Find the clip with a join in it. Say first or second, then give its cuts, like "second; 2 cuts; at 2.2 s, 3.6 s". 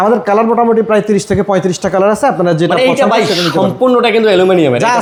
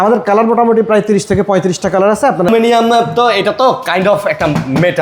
second; 1 cut; at 2.5 s